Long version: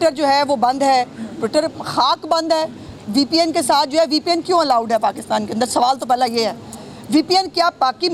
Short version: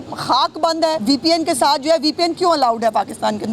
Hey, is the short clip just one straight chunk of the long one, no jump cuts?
no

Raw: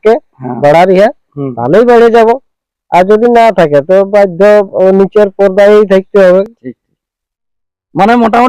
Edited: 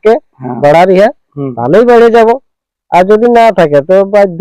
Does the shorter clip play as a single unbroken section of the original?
yes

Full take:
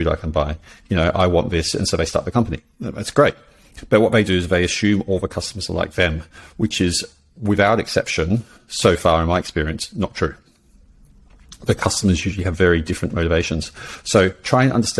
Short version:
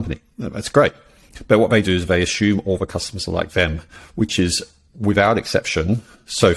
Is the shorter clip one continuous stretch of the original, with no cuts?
yes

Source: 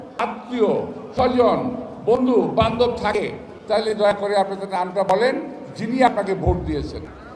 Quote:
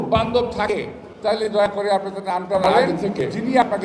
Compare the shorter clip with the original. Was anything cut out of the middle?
no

